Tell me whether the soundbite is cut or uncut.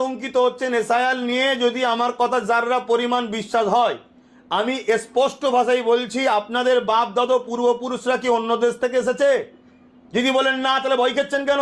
uncut